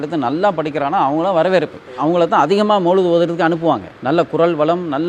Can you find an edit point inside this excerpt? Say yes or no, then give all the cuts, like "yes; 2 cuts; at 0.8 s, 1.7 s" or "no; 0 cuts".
no; 0 cuts